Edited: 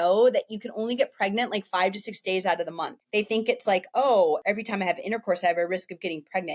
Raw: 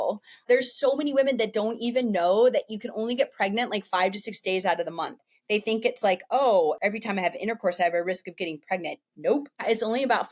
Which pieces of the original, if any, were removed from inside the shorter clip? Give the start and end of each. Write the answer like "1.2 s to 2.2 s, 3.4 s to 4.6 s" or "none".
5.1 s to 5.3 s